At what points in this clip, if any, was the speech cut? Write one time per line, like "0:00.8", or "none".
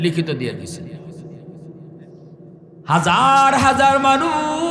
none